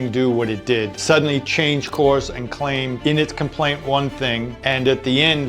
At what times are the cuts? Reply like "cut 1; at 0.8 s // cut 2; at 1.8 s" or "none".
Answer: cut 1; at 0.9 s // cut 2; at 3.0 s // cut 3; at 4.5 s